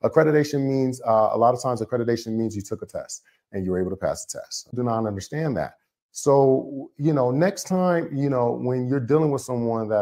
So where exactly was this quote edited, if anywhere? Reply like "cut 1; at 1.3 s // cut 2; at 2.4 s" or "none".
cut 1; at 4.7 s